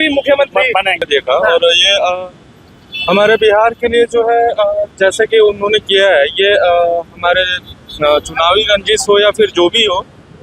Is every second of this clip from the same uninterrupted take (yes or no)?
no